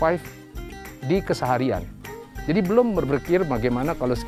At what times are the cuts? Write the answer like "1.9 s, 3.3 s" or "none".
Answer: none